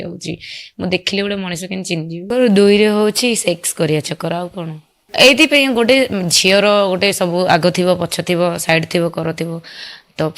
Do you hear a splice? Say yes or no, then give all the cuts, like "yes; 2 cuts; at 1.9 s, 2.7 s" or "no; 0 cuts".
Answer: yes; 1 cut; at 2.3 s